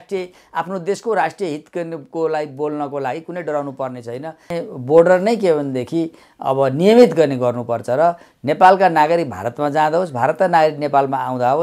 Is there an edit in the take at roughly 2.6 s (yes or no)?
no